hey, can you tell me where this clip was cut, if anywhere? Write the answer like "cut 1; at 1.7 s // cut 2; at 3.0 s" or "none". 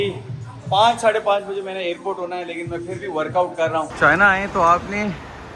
cut 1; at 3.9 s